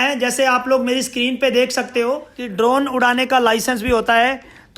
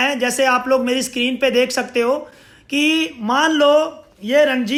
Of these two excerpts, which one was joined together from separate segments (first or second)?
first